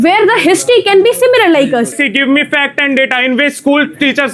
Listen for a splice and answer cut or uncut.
cut